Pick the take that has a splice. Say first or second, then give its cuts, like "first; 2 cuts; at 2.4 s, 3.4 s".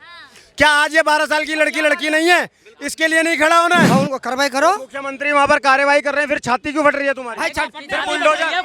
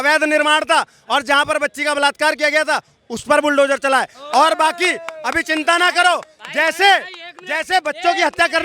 first; 1 cut; at 3.9 s